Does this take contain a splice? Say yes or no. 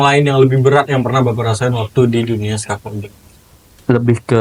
no